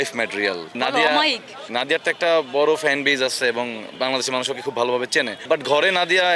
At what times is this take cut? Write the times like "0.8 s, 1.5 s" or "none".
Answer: 1.7 s, 3.8 s